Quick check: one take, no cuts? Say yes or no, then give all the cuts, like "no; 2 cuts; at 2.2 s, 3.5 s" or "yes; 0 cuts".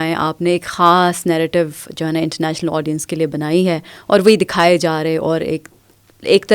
yes; 0 cuts